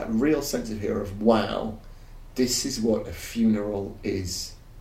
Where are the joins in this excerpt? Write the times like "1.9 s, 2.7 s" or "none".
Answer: none